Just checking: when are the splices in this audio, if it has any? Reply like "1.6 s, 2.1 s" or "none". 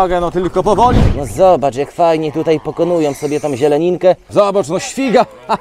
1.0 s, 4.2 s